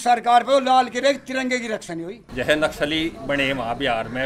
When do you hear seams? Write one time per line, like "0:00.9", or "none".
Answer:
0:02.2